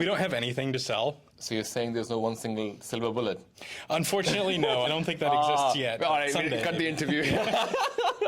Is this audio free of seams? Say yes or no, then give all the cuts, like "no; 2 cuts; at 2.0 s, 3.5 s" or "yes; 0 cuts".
no; 1 cut; at 1.3 s